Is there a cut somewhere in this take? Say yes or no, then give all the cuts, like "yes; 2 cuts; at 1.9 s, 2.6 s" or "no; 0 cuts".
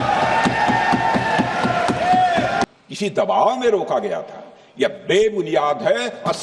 yes; 1 cut; at 2.7 s